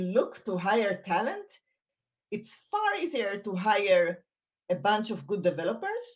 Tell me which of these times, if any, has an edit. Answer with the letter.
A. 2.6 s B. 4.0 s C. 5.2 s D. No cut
D